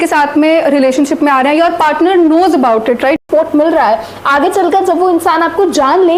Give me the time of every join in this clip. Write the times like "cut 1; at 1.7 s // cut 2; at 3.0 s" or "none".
cut 1; at 3.2 s